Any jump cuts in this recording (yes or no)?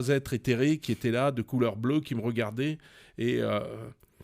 no